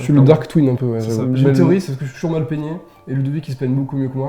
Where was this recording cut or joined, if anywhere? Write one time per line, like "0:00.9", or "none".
0:01.2